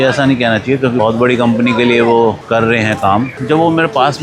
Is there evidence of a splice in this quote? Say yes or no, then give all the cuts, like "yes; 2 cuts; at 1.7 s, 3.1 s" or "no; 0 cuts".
yes; 2 cuts; at 1.0 s, 3.3 s